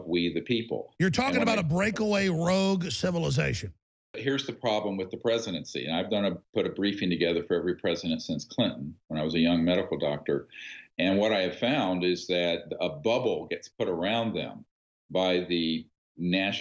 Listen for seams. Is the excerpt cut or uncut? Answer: cut